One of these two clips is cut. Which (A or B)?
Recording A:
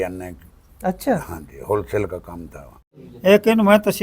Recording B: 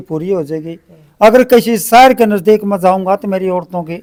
A